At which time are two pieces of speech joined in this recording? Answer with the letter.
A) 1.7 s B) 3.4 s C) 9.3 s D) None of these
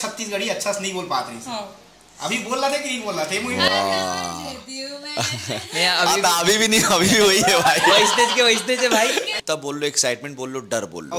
C